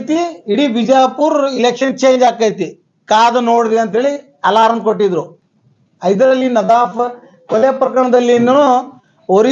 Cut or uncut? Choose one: cut